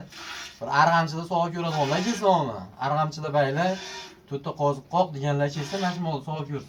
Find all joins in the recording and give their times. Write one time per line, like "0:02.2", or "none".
none